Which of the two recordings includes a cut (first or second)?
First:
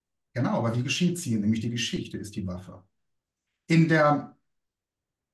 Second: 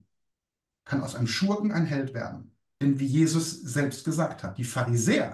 second